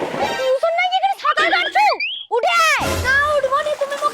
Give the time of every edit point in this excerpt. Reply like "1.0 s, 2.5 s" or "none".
none